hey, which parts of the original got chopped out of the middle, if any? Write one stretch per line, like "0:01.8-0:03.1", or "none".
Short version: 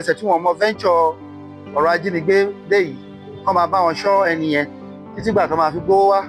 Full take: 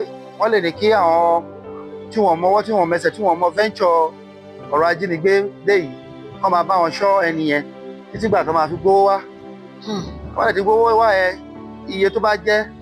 none